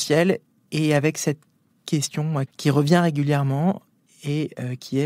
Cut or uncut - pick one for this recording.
cut